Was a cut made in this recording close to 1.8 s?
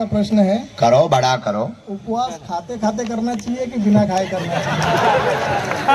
no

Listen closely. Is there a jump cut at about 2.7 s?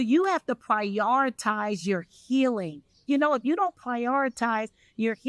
no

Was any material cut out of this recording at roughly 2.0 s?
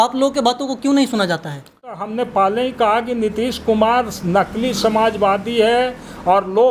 yes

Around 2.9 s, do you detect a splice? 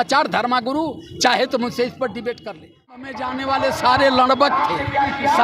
yes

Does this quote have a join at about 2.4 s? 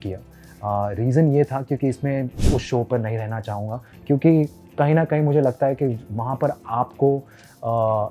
yes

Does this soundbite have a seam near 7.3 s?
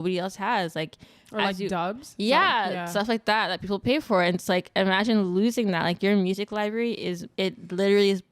yes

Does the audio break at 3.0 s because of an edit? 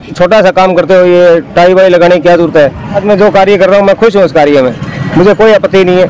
yes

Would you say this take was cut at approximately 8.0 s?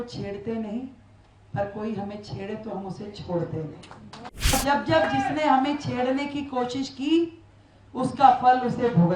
no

